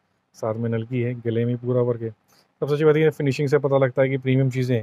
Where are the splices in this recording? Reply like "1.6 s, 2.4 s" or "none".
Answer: none